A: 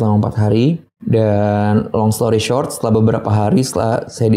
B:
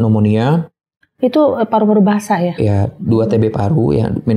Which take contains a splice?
A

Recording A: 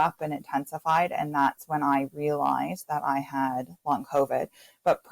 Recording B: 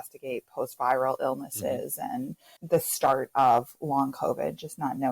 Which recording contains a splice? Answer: B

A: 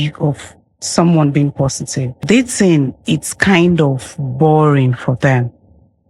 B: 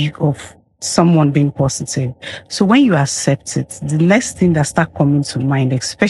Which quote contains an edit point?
A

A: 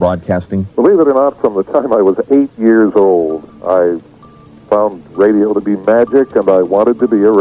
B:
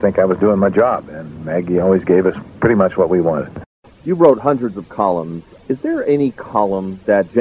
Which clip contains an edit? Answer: B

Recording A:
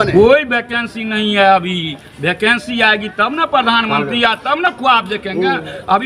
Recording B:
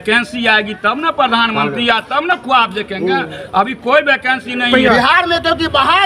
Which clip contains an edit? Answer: B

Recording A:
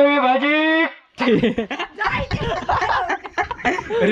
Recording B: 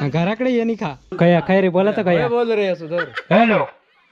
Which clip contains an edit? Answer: B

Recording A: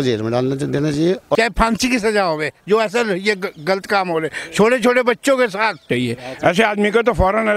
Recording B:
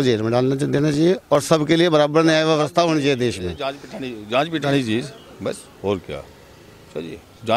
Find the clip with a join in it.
A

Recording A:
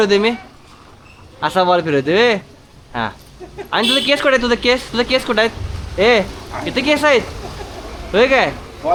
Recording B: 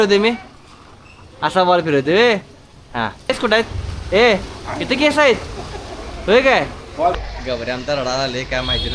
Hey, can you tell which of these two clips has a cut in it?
B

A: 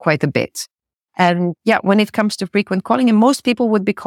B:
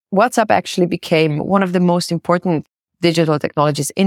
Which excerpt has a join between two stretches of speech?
B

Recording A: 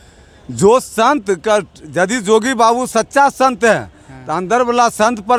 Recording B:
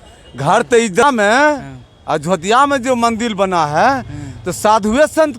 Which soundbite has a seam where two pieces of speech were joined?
B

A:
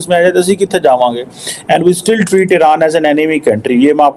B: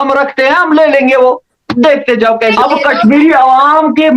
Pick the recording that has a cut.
B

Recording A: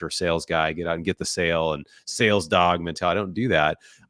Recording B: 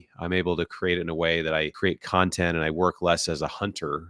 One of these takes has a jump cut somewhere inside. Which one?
B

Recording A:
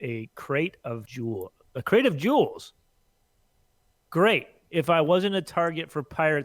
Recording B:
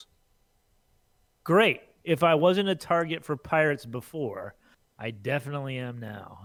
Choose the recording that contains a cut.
A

